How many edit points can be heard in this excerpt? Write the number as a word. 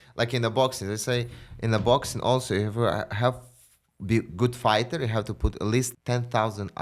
one